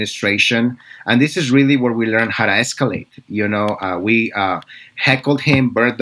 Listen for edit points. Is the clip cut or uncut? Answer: uncut